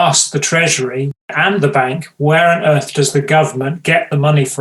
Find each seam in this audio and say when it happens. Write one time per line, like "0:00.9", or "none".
0:01.2